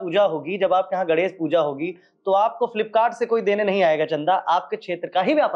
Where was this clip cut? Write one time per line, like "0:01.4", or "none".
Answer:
none